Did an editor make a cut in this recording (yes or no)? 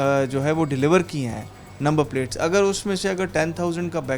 no